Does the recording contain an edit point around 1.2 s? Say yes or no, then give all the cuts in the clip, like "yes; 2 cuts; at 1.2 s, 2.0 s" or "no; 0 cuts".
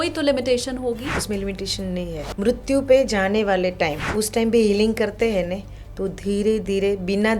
yes; 3 cuts; at 1.2 s, 2.3 s, 4.0 s